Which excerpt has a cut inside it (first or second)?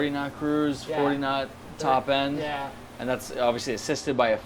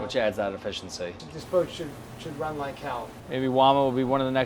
second